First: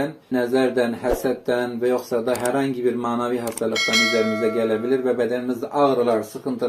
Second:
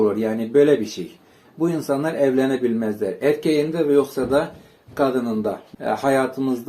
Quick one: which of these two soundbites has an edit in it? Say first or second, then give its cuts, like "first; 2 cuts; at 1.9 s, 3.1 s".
second; 1 cut; at 5.6 s